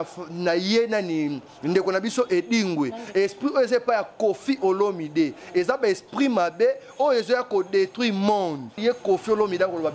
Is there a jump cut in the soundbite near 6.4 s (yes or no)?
no